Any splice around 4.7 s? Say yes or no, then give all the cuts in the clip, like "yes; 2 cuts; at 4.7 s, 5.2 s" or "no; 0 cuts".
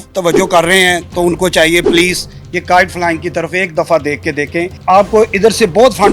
yes; 1 cut; at 4.7 s